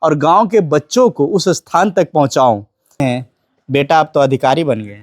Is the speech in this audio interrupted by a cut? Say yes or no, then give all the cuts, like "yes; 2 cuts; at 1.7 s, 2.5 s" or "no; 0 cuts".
yes; 1 cut; at 3.0 s